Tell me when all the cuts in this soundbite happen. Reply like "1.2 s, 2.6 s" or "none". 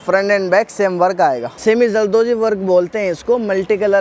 1.5 s